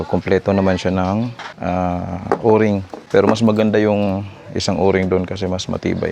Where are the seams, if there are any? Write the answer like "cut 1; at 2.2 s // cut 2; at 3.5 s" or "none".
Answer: cut 1; at 1.5 s // cut 2; at 2.9 s